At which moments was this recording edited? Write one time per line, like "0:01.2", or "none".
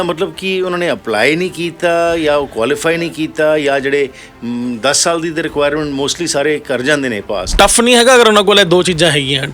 0:07.5

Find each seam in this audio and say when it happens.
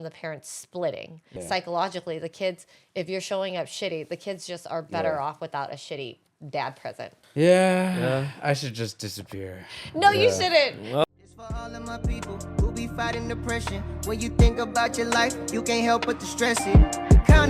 0:01.3
0:07.2
0:11.0

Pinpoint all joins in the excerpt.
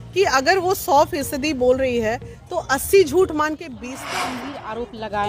0:04.0

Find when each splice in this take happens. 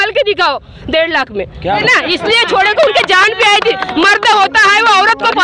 0:01.8

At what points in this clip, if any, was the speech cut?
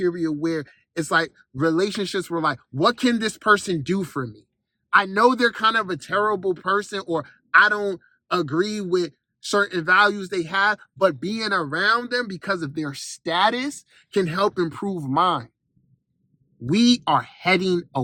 none

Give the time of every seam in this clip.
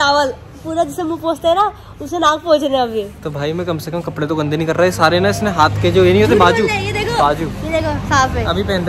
none

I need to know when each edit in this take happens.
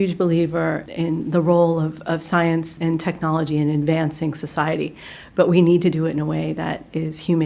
0:00.8
0:02.7

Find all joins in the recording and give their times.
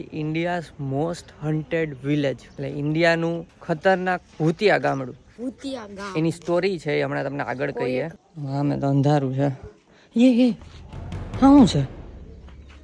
0:02.5
0:04.3
0:08.2

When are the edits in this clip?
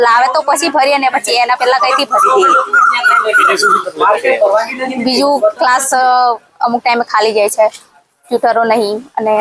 none

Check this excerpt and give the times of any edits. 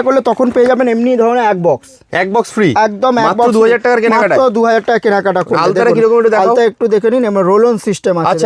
none

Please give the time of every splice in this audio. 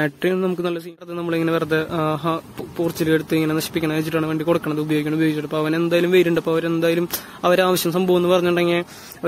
0:01.1

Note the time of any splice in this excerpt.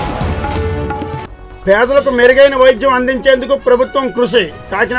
0:01.1

